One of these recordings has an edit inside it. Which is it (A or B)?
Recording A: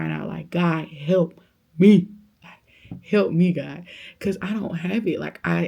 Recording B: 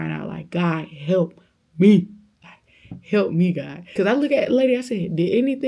B